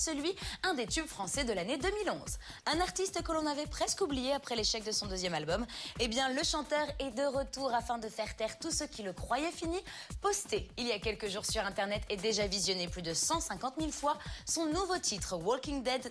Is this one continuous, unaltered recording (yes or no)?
no